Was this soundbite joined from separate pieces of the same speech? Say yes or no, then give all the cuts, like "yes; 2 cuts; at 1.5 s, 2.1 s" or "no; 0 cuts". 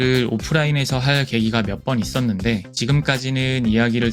no; 0 cuts